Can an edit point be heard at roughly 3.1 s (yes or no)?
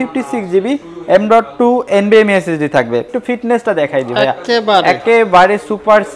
yes